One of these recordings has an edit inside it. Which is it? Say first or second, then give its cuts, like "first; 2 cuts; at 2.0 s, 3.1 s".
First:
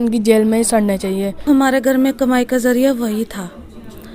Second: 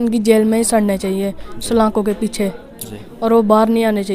first; 1 cut; at 1.4 s